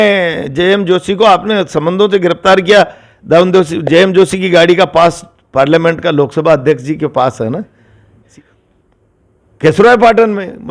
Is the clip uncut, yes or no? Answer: no